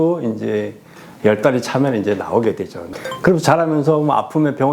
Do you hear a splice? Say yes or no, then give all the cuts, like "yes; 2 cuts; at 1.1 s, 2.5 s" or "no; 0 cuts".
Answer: yes; 1 cut; at 2.8 s